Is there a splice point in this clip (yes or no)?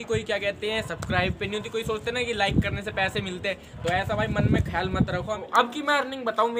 yes